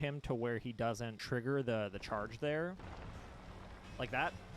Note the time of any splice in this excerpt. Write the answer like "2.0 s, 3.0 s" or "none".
1.1 s, 2.8 s